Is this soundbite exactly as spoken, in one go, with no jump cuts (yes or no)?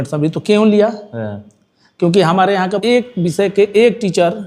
no